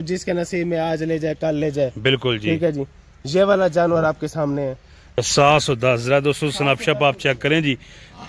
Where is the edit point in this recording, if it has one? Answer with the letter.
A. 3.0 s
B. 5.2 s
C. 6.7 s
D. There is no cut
B